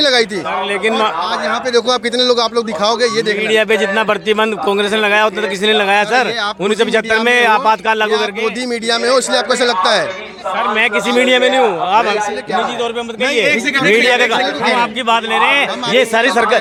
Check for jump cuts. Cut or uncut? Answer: uncut